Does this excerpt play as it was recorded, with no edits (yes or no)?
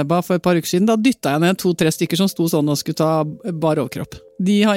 yes